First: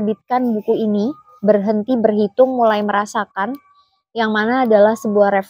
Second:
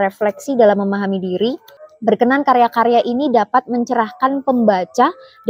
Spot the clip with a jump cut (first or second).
second